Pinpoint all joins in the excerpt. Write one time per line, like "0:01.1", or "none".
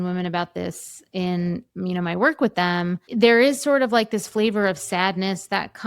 0:03.1